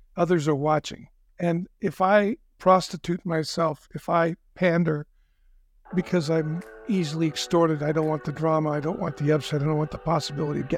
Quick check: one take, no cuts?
no; 2 cuts; at 1.2 s, 2.5 s

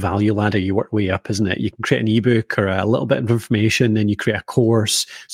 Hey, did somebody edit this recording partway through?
yes; 1 cut; at 1.7 s

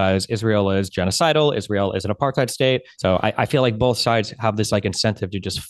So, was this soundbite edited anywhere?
yes; 1 cut; at 2.9 s

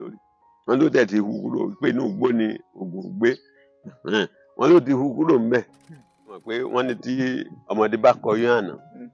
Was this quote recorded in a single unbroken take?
no; 1 cut; at 6.3 s

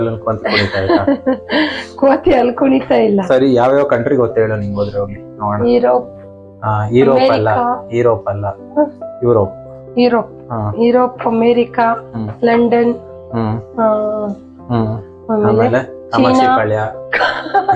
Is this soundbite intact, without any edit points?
yes; 0 cuts

